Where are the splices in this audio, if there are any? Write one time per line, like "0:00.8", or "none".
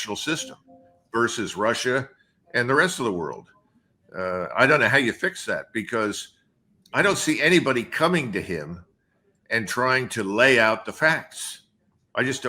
none